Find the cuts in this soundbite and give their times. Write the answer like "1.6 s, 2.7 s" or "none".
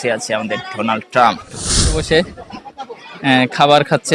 1.9 s